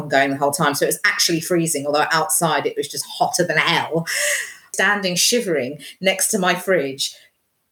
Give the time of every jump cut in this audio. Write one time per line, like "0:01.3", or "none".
0:04.7

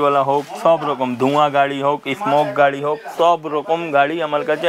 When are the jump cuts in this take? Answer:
none

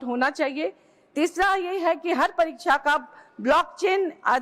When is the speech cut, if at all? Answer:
none

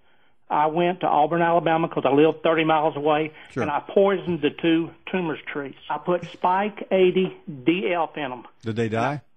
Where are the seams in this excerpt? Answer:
0:05.8

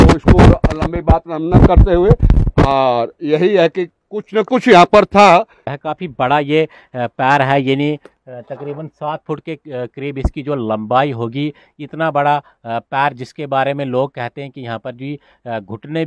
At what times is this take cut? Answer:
0:05.7

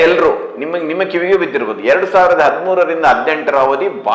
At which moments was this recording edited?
none

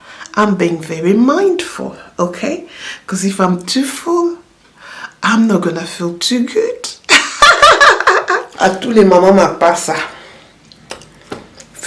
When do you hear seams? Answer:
0:08.5

